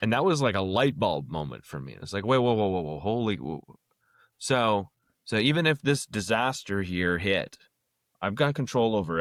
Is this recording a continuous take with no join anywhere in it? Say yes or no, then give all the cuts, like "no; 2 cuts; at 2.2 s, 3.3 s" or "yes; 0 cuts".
yes; 0 cuts